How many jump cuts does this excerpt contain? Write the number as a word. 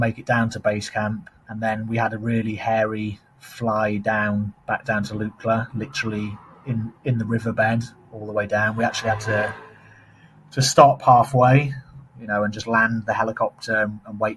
zero